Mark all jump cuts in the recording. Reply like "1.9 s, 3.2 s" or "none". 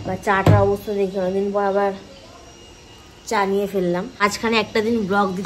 4.2 s